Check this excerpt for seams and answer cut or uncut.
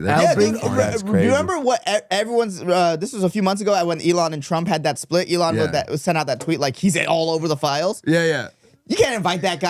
uncut